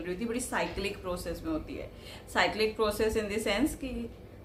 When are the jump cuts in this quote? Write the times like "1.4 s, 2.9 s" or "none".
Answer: none